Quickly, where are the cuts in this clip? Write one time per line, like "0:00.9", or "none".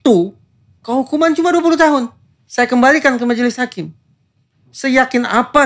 none